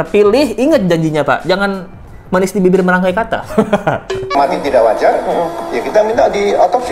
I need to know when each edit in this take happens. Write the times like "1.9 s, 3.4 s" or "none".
4.3 s